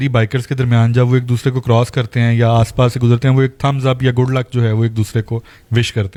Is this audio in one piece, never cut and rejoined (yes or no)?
yes